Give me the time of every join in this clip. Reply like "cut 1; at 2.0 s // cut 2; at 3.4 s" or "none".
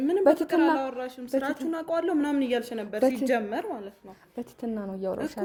none